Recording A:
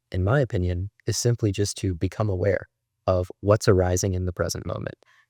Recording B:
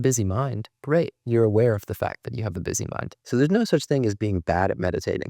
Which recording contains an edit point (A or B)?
B